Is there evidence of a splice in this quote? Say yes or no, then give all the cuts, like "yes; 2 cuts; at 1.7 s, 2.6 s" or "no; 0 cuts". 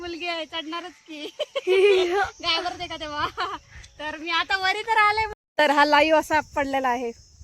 yes; 1 cut; at 5.3 s